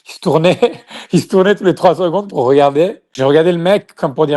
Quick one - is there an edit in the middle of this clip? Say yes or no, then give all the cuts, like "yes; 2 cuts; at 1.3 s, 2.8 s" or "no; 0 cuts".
yes; 1 cut; at 3.1 s